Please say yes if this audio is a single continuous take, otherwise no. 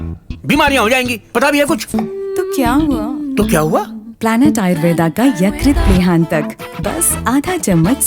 no